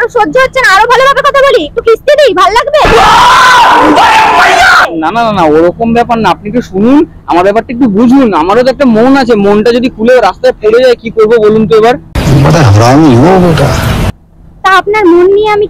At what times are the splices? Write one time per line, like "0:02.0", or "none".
none